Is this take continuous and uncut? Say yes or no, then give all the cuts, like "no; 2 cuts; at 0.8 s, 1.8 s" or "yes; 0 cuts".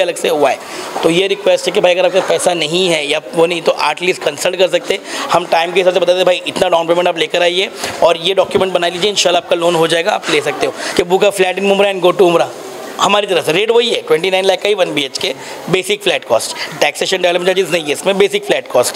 no; 1 cut; at 10.8 s